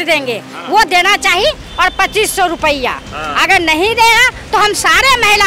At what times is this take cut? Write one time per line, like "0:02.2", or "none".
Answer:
none